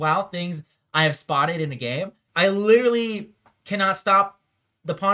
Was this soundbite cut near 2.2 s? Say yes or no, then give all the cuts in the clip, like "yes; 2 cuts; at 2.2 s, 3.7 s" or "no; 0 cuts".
yes; 1 cut; at 2.2 s